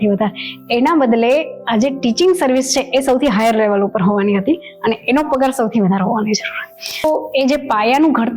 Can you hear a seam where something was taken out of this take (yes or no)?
yes